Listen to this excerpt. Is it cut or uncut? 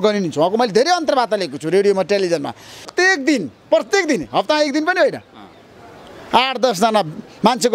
cut